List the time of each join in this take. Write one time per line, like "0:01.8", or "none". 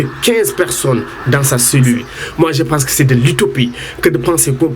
0:02.2